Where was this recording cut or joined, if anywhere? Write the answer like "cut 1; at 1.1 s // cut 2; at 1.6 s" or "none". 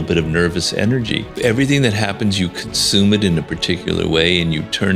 cut 1; at 1.4 s